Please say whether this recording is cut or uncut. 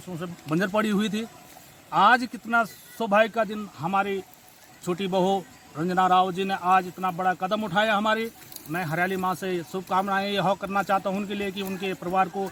uncut